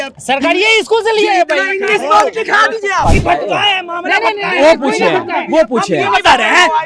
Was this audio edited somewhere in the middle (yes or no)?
yes